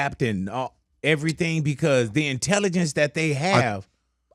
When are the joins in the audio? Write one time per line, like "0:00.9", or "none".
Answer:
none